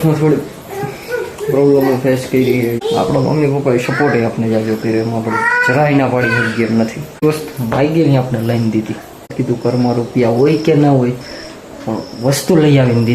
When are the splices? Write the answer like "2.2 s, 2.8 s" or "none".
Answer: 2.8 s, 7.2 s, 9.3 s